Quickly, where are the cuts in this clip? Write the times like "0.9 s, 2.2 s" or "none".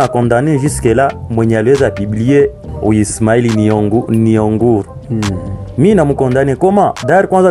2.6 s